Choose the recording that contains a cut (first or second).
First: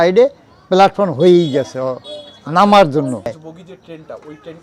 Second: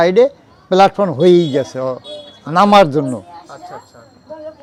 first